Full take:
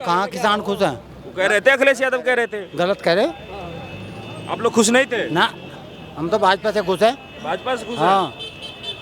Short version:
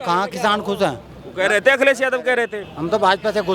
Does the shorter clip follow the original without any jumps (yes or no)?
no